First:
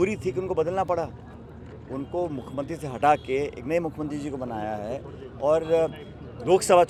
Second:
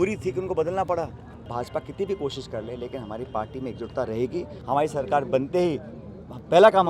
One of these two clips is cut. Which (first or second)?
second